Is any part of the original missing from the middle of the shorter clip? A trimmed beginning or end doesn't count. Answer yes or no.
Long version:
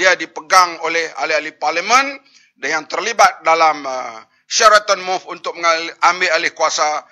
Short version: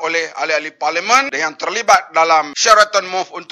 yes